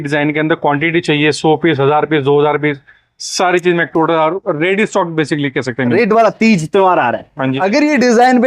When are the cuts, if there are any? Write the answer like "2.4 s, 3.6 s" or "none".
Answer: 5.9 s